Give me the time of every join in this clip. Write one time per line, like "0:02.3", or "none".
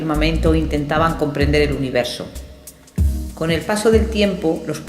0:02.9